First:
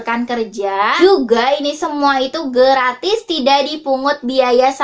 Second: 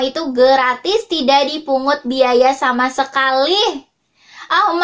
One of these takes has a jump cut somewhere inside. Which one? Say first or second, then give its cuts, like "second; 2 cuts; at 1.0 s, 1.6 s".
first; 1 cut; at 0.9 s